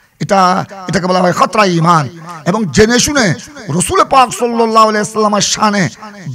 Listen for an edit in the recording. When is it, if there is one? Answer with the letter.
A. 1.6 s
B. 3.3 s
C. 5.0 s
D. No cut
D